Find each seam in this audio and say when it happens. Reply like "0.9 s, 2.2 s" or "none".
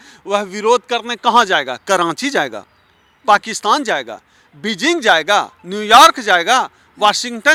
none